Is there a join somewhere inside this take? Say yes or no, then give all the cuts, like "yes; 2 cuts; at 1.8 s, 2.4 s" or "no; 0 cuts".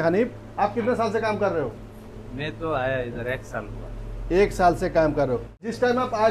no; 0 cuts